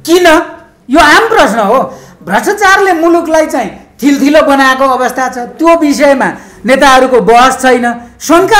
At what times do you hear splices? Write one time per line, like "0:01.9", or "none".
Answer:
none

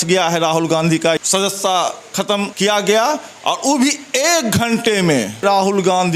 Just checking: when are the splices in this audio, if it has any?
0:01.2
0:02.5
0:05.4

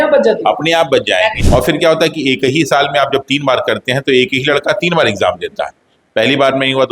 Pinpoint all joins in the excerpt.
0:01.4

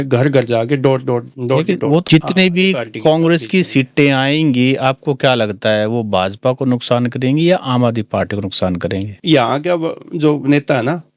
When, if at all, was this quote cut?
0:02.0
0:09.2

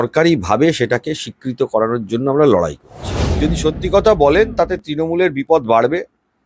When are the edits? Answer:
0:03.3

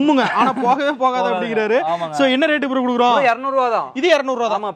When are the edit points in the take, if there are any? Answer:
none

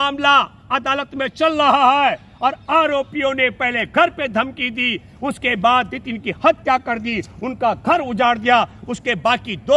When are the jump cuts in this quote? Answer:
none

